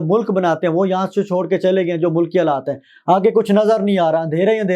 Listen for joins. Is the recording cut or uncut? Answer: uncut